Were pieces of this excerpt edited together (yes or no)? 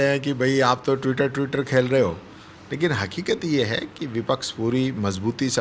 no